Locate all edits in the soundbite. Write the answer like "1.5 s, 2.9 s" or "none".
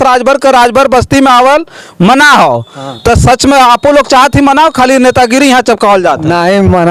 none